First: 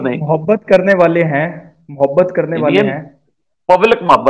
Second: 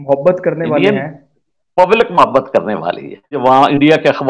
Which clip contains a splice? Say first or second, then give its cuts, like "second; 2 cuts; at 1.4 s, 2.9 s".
second; 1 cut; at 3.4 s